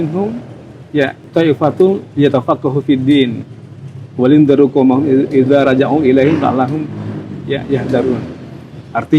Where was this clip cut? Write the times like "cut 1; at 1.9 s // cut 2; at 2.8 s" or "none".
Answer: cut 1; at 1.2 s

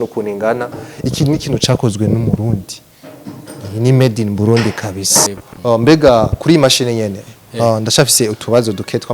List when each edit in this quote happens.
cut 1; at 5.4 s

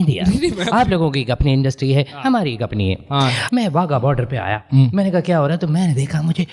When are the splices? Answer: cut 1; at 3.4 s

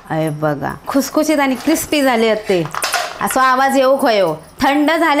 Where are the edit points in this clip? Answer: cut 1; at 0.9 s // cut 2; at 3.1 s

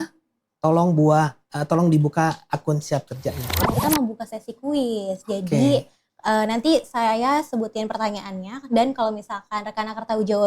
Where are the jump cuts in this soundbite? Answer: cut 1; at 3.6 s

